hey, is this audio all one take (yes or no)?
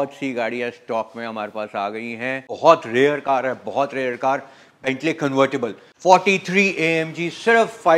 no